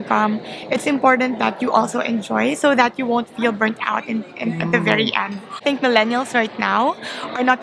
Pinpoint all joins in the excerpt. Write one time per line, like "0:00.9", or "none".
0:05.6